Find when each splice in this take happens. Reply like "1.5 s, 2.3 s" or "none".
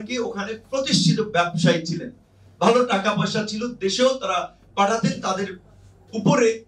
none